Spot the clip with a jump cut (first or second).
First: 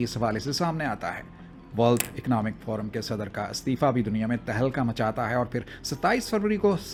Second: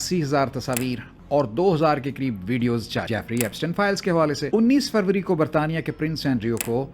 second